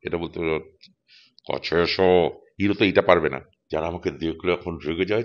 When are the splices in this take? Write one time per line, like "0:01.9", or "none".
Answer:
0:03.5

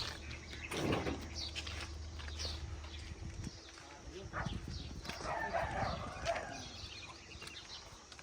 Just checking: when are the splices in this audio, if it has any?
none

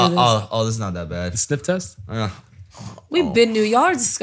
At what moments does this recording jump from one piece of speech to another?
none

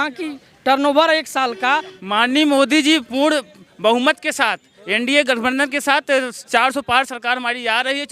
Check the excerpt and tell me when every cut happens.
0:01.9

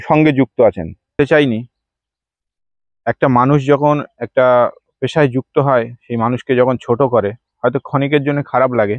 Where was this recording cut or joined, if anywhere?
0:01.2

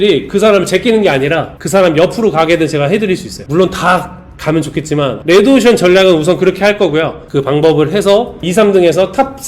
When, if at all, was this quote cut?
0:05.1
0:07.2
0:08.4

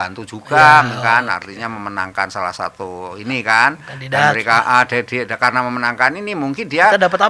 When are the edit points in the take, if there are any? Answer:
none

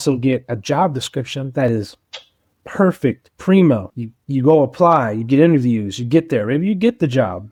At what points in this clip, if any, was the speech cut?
none

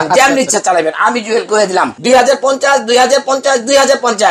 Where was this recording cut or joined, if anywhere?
0:01.9

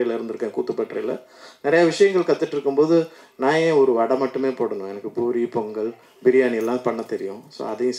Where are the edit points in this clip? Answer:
none

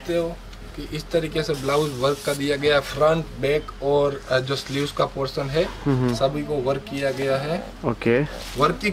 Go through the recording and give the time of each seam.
none

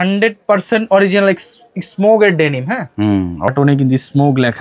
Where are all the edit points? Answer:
0:03.5

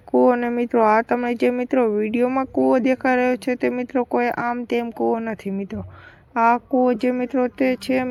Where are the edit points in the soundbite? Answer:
none

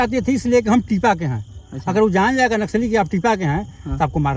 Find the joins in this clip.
none

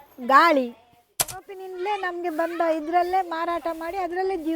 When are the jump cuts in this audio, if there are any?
0:01.4

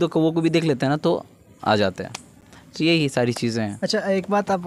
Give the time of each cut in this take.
none

